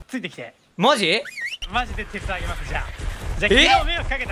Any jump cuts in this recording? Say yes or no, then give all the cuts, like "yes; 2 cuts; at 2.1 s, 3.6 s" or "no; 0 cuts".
yes; 1 cut; at 1.6 s